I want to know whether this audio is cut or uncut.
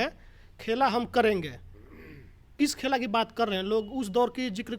uncut